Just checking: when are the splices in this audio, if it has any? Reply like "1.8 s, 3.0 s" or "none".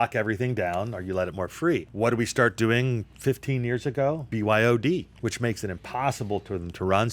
1.9 s, 4.2 s, 5.1 s